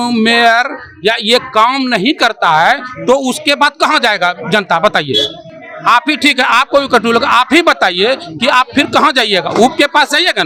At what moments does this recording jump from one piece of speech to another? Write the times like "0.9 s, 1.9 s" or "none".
none